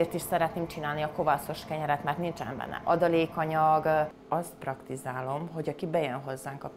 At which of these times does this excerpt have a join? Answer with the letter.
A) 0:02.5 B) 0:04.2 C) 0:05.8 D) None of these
B